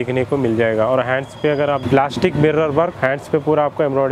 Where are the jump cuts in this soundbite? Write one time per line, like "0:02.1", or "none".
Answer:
0:01.8
0:02.9